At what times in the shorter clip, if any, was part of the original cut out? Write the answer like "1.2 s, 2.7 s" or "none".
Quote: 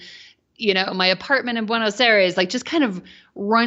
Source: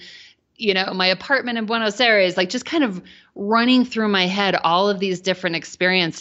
none